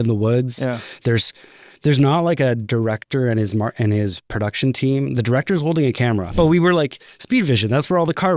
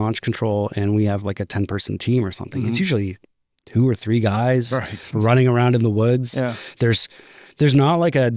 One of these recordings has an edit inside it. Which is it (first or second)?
first